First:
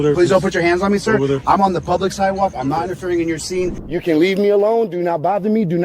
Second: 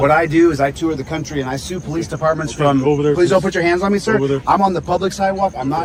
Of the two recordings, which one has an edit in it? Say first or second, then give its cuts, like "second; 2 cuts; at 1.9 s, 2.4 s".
first; 1 cut; at 3.8 s